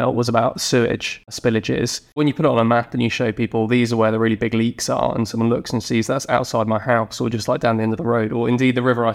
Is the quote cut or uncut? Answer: cut